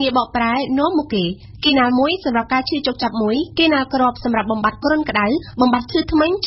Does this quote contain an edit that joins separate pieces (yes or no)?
yes